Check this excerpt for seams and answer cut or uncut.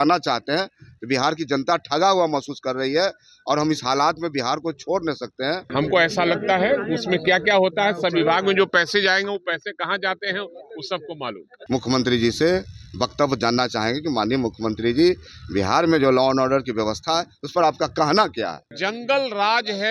cut